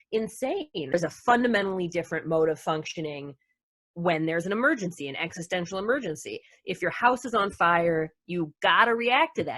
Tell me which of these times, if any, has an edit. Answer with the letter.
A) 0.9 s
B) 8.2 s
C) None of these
A